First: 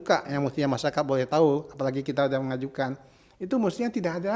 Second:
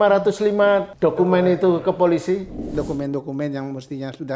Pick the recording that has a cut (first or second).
second